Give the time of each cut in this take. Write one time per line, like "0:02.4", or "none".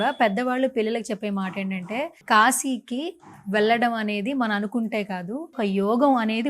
0:02.2
0:05.6